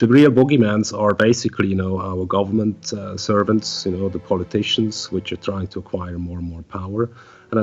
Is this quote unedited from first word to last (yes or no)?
yes